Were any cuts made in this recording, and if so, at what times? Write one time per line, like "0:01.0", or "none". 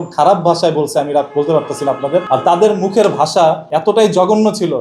0:02.2
0:03.7